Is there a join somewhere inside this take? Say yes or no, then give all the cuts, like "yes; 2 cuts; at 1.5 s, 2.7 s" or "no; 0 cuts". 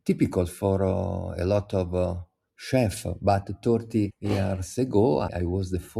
yes; 2 cuts; at 4.2 s, 5.3 s